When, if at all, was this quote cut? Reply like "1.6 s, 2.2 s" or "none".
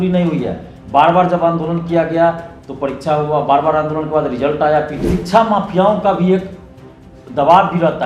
5.1 s